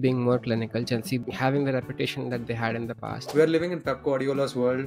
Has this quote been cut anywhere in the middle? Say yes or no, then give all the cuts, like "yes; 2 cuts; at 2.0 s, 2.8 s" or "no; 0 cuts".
yes; 1 cut; at 3.3 s